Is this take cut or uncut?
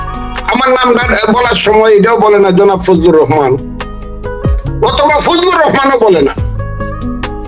cut